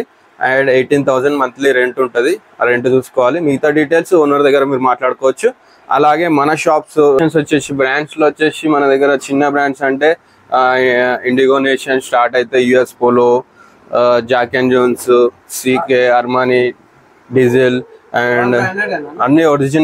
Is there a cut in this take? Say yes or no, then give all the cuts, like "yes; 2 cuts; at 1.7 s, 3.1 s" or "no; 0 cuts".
yes; 1 cut; at 7.2 s